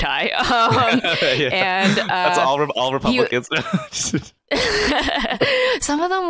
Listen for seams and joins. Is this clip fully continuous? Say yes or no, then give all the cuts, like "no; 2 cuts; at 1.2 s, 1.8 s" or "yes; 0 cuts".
yes; 0 cuts